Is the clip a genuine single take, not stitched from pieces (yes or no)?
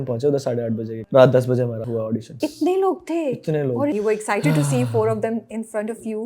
no